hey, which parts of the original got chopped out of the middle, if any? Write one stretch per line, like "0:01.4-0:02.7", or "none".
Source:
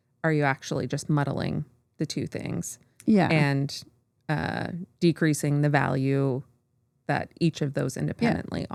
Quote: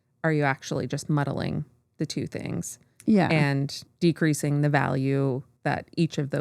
0:03.8-0:04.8
0:06.5-0:06.9